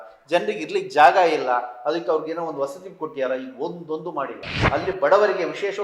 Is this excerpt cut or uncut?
cut